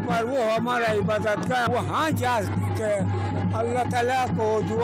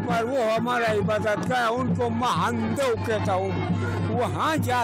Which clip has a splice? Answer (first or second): first